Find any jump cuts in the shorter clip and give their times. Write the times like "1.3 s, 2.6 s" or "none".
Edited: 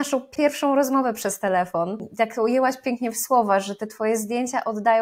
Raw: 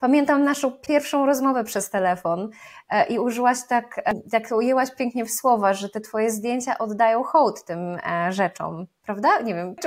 2.1 s